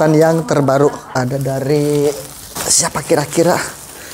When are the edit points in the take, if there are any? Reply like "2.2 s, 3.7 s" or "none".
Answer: 1.2 s